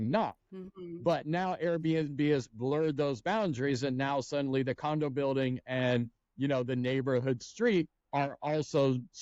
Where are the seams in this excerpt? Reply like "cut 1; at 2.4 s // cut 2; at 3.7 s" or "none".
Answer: cut 1; at 8.0 s